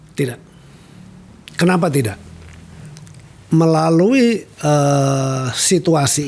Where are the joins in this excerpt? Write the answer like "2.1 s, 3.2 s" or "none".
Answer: none